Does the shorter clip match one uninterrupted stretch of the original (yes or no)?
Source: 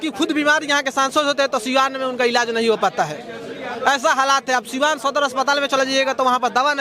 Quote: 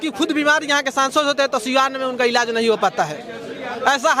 yes